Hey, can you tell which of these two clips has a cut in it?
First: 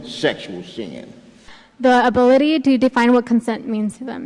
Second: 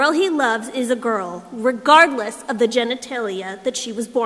first; 1 cut; at 1.5 s

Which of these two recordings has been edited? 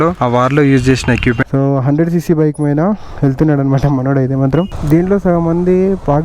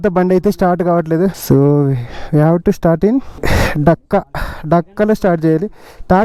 first; 2 cuts; at 1.4 s, 4.7 s

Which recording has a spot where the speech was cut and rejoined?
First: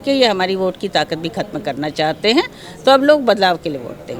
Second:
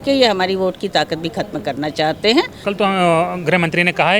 second; 1 cut; at 2.6 s

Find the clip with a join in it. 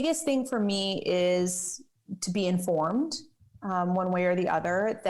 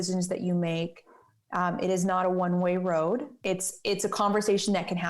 second; 1 cut; at 3.3 s

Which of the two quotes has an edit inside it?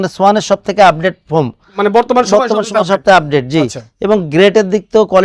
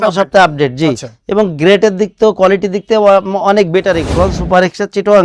second; 1 cut; at 4.0 s

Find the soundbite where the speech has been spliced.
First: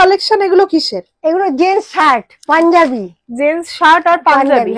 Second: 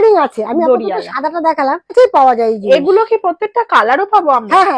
second; 1 cut; at 1.9 s

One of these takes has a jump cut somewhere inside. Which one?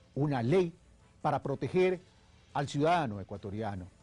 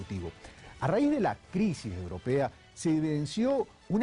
first; 1 cut; at 1.0 s

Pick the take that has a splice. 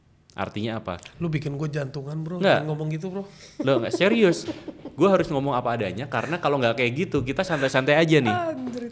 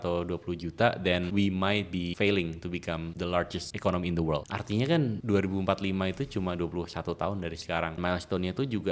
second; 6 cuts; at 1.3 s, 2.1 s, 3.4 s, 4.5 s, 5.2 s, 8.0 s

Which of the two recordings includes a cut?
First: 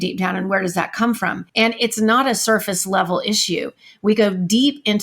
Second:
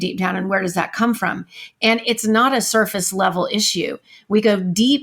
first; 1 cut; at 1.4 s

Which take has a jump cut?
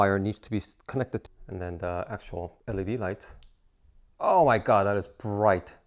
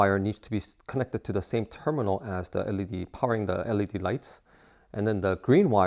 first; 2 cuts; at 1.2 s, 2.6 s

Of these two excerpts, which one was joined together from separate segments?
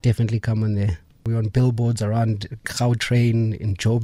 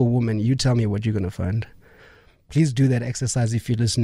first; 1 cut; at 1.2 s

